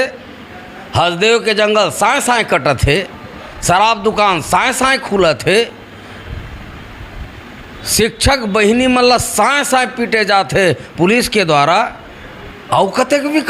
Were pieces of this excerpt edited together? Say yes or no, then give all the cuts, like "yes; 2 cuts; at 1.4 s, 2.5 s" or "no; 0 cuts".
no; 0 cuts